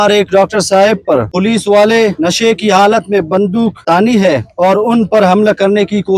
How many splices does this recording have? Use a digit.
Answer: 4